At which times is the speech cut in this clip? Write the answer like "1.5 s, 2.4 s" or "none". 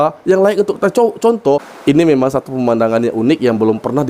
1.7 s